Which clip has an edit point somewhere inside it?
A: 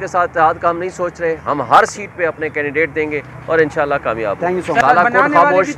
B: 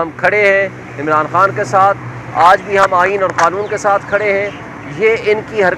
A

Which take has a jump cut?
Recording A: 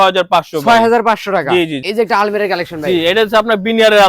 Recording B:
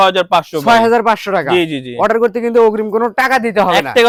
A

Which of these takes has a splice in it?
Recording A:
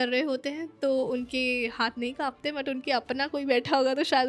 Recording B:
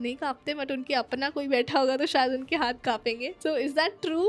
B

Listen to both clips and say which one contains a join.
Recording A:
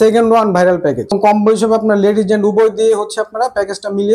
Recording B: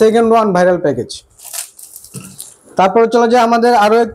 A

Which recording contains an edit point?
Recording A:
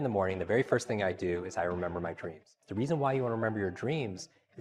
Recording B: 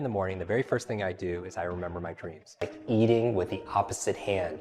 B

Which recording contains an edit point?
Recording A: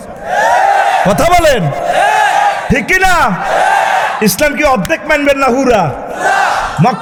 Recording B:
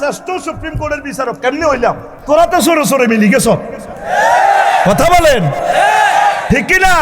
B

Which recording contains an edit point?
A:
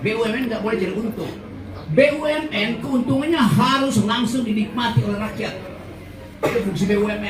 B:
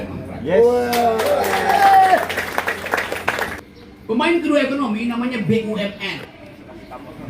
B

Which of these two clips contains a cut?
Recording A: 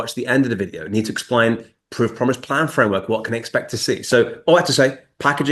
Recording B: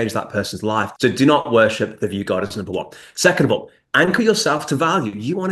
B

